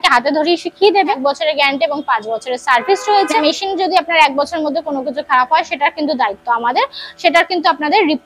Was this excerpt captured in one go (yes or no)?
no